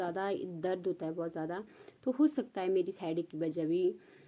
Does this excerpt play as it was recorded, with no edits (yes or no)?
yes